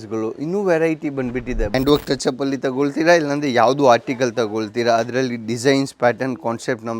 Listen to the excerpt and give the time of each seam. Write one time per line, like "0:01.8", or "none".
0:01.7